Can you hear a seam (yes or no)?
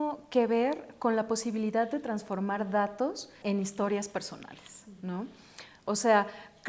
yes